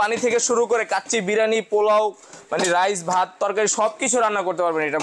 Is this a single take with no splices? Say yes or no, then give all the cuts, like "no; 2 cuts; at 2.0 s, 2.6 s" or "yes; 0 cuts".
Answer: yes; 0 cuts